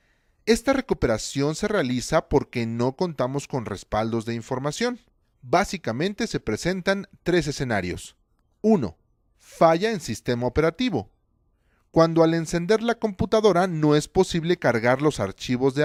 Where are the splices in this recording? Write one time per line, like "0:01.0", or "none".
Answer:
none